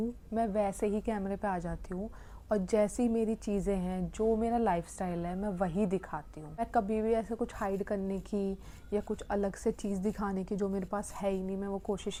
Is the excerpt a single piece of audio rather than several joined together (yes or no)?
yes